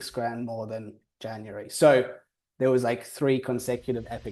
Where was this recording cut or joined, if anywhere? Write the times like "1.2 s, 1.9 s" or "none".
none

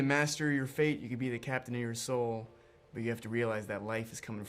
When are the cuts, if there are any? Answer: none

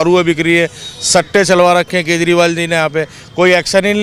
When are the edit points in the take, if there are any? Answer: none

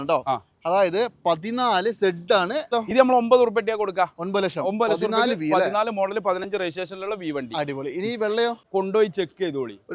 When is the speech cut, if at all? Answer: 2.7 s, 8.6 s

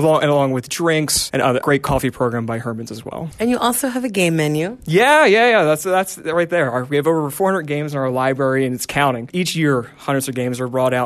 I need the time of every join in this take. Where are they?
3.2 s, 9.3 s

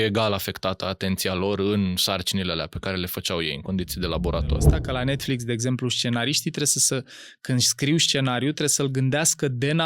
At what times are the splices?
4.8 s

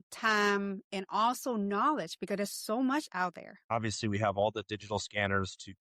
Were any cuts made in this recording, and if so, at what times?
3.7 s

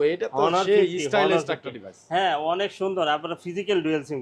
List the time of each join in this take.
none

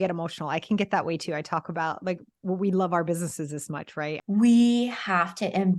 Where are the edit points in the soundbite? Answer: 4.2 s

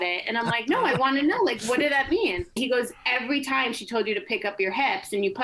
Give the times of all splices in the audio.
2.5 s

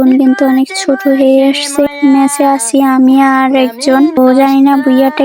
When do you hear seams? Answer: 4.2 s

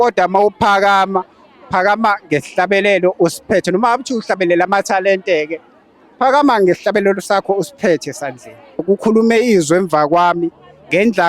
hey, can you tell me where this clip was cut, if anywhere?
8.8 s

